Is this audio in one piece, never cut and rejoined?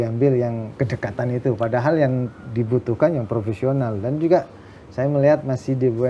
yes; 0 cuts

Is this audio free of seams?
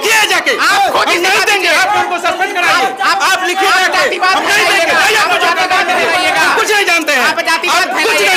yes; 0 cuts

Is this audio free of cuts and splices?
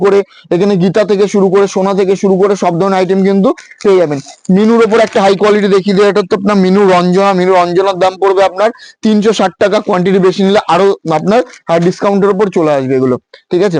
yes; 0 cuts

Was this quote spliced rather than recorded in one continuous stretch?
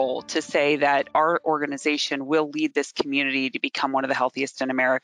no; 0 cuts

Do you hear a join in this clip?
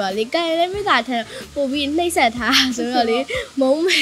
no; 0 cuts

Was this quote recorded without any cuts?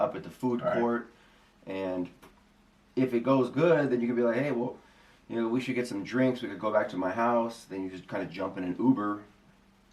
yes; 0 cuts

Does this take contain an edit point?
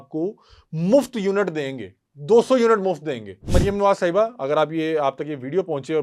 yes; 1 cut; at 3.5 s

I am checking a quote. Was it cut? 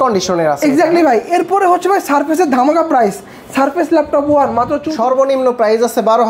yes; 1 cut; at 4.8 s

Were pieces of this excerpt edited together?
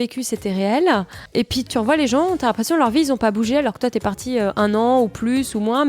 yes; 1 cut; at 1.6 s

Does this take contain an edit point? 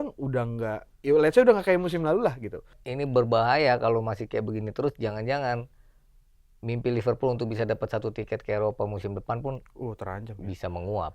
yes; 1 cut; at 2.8 s

